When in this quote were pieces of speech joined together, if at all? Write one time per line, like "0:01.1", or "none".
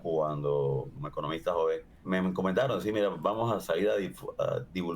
0:01.0
0:01.9